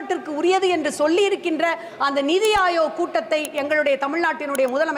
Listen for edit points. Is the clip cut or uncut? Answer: uncut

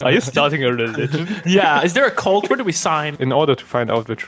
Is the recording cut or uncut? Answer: cut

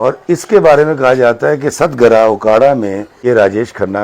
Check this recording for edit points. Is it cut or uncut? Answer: cut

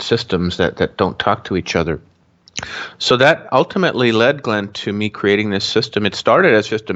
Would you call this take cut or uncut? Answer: uncut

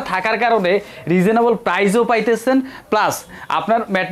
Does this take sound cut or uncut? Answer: uncut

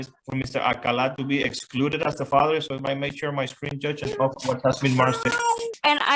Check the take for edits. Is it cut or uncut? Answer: uncut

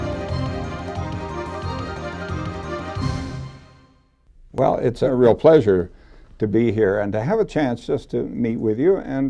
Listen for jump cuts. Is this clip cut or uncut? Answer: uncut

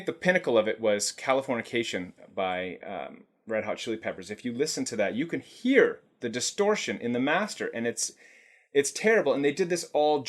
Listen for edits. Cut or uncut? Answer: uncut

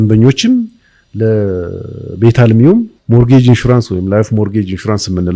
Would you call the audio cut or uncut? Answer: cut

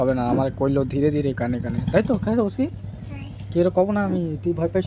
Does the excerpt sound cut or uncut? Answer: uncut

